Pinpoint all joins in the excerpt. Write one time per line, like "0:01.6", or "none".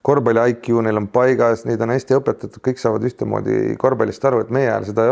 none